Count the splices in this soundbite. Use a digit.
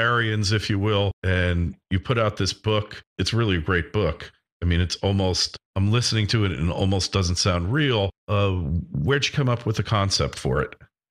1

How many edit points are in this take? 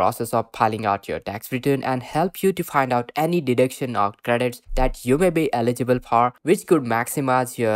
0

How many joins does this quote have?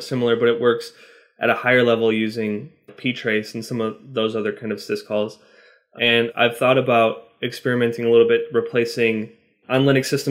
0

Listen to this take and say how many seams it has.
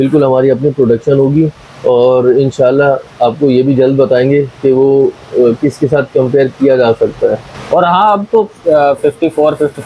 1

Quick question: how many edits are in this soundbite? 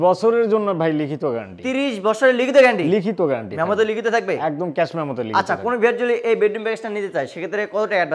0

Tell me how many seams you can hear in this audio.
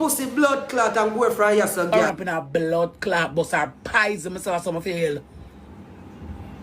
1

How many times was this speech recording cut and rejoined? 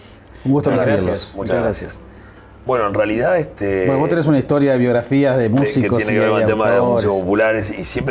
1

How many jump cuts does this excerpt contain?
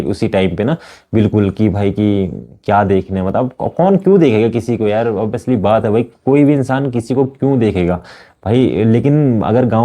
0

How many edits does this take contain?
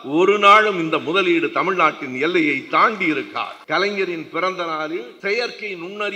2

